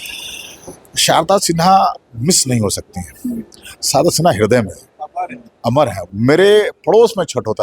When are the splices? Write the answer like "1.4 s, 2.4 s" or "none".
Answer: 6.0 s